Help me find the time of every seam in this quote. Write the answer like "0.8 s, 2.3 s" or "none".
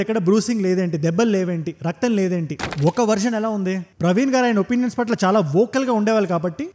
2.6 s